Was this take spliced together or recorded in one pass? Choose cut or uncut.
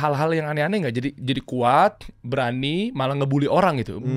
uncut